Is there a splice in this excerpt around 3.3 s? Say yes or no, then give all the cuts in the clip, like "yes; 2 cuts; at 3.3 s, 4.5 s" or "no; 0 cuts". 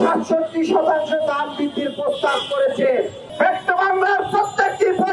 yes; 1 cut; at 3.3 s